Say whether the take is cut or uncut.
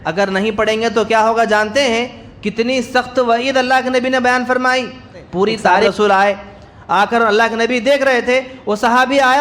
cut